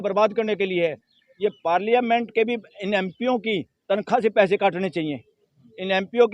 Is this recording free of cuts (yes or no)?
yes